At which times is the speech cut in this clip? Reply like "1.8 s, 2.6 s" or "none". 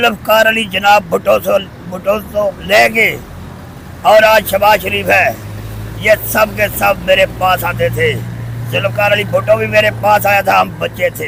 none